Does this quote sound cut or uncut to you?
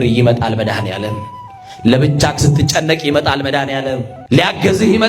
cut